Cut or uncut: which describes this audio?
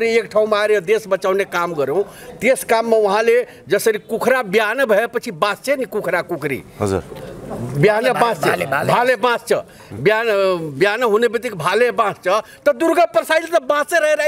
uncut